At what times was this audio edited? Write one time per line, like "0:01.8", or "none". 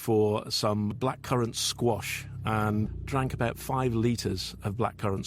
0:01.0